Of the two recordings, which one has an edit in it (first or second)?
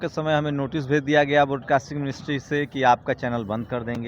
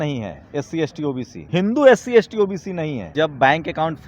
second